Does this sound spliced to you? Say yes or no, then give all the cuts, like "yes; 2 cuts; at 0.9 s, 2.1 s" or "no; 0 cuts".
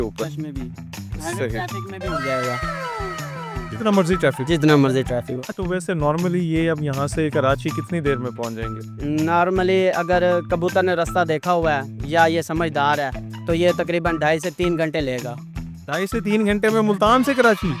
yes; 1 cut; at 5.4 s